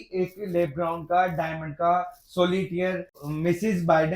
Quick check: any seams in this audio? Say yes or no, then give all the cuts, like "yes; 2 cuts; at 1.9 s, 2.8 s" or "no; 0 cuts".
yes; 1 cut; at 3.2 s